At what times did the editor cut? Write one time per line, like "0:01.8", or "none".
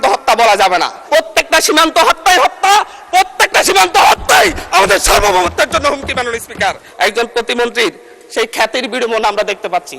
0:01.0
0:06.9

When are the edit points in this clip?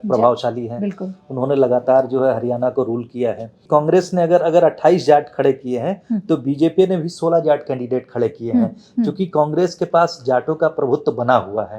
0:03.6

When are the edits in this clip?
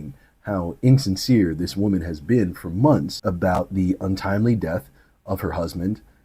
0:03.1

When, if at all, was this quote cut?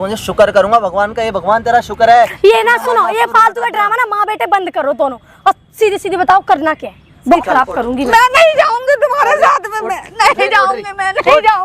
0:07.4

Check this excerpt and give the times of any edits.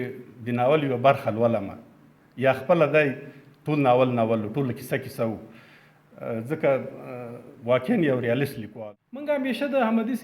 0:08.6

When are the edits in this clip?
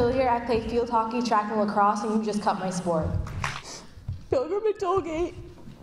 0:03.8

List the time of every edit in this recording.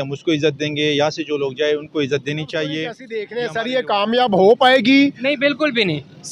0:03.0

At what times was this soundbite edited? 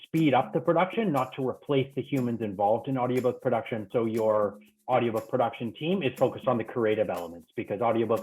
0:03.9

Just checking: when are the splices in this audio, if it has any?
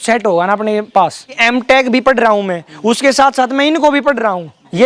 0:01.4

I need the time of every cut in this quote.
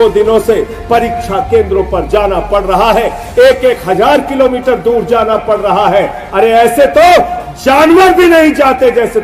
none

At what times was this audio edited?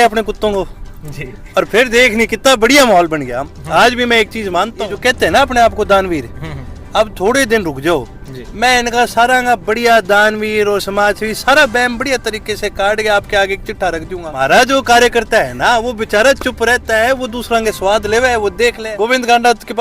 0:04.9
0:14.2
0:18.8

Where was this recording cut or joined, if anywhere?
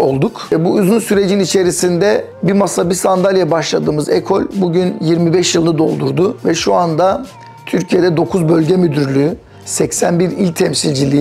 none

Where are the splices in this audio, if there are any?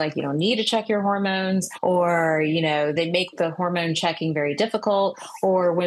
0:01.7
0:02.9

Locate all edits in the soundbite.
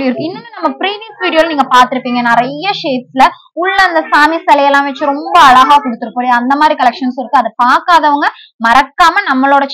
none

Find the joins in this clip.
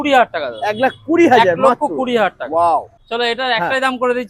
0:03.0

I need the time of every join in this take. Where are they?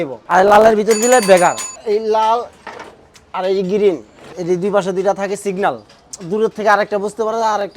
0:01.7
0:04.3

